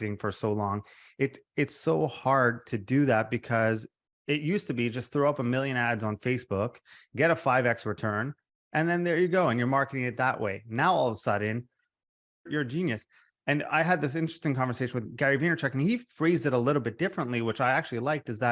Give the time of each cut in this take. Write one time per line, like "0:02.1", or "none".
0:12.5
0:15.0